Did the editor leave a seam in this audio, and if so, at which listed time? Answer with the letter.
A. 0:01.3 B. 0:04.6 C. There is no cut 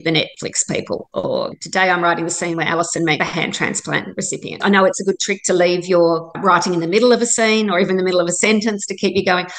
B